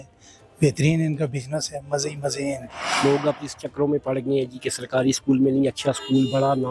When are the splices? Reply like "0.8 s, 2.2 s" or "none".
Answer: 2.9 s